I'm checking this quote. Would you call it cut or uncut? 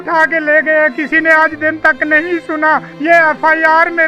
cut